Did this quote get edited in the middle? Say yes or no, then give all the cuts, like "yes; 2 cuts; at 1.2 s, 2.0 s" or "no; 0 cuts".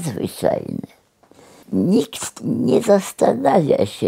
yes; 1 cut; at 1.6 s